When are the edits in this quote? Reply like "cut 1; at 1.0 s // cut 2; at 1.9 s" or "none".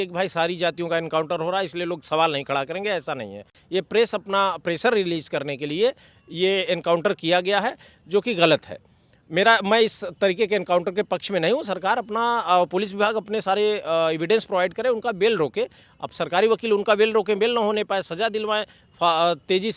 none

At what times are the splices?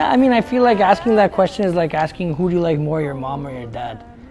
none

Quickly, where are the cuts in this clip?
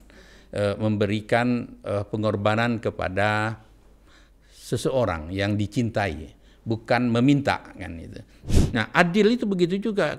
cut 1; at 8.4 s

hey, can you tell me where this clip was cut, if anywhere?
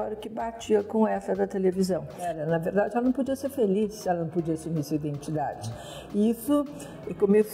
cut 1; at 2.2 s

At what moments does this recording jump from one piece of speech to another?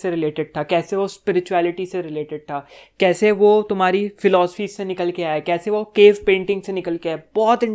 none

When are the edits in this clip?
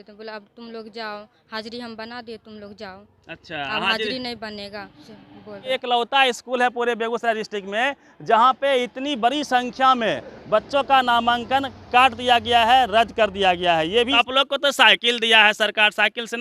cut 1; at 5.7 s // cut 2; at 14.1 s

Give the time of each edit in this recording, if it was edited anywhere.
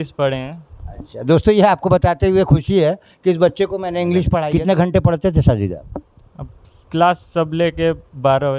cut 1; at 4.4 s

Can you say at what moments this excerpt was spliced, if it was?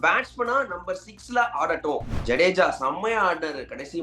cut 1; at 2.1 s

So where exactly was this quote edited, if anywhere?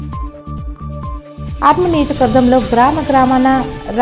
cut 1; at 1.4 s

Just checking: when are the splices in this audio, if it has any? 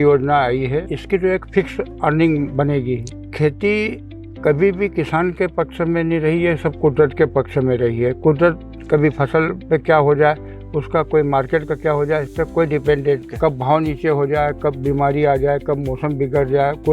cut 1; at 1.0 s // cut 2; at 3.1 s // cut 3; at 13.3 s

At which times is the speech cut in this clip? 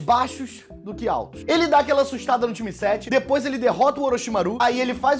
cut 1; at 3.2 s

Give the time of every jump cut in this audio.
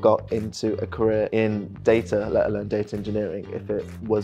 cut 1; at 1.3 s

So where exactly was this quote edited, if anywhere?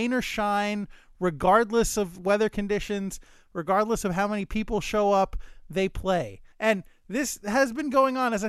cut 1; at 6.5 s

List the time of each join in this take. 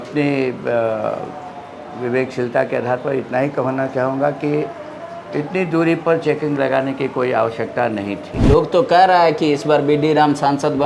cut 1; at 8.4 s

